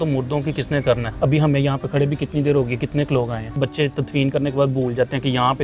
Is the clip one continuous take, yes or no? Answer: no